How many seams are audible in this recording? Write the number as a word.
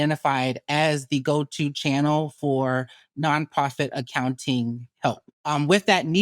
one